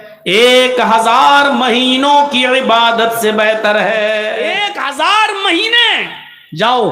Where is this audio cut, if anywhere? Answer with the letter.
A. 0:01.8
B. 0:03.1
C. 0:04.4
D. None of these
C